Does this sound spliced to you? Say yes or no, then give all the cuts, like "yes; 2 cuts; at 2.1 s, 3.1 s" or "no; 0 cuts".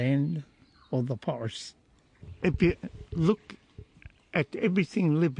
yes; 1 cut; at 2.2 s